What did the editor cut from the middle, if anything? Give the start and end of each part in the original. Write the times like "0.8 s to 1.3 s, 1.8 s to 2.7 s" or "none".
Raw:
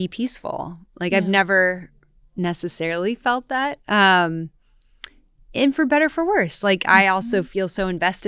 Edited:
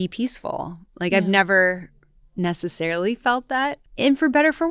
3.8 s to 5.4 s

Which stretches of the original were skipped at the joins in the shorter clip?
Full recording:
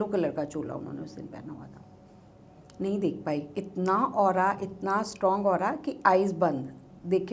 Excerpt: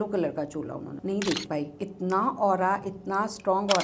0.9 s to 2.7 s

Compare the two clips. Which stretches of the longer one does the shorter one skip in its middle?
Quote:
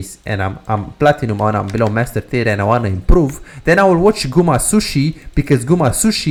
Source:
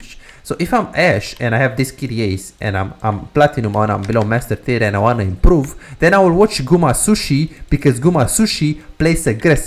none

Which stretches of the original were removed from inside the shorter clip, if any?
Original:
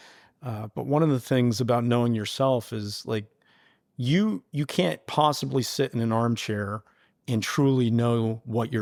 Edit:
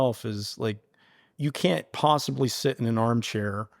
3.8 s to 4.5 s

